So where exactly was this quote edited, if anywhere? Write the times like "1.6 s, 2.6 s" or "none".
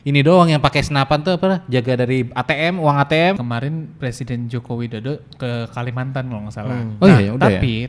3.4 s